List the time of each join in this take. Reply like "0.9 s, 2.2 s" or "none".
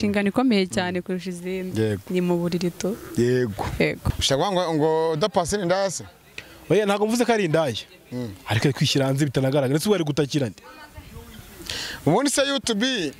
4.0 s